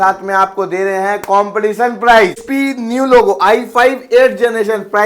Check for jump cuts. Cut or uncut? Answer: cut